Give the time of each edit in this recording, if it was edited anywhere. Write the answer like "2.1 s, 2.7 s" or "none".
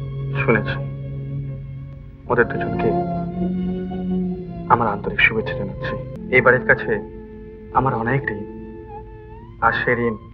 6.1 s